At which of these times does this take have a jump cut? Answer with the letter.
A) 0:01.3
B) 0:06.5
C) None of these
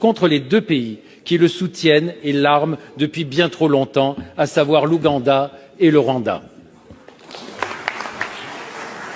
C